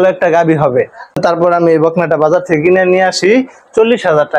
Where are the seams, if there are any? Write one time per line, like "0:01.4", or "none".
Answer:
0:01.2